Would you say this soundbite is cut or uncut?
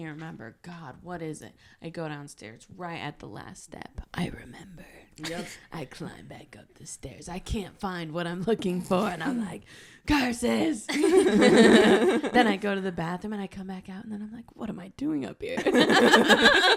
uncut